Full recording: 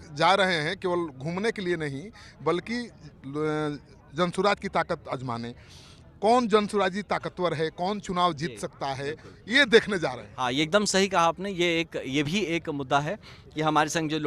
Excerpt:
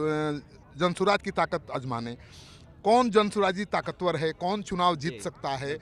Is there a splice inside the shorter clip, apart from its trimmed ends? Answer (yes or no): no